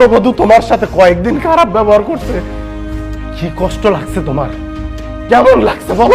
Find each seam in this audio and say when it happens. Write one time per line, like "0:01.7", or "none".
none